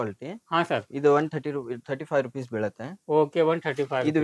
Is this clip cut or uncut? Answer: uncut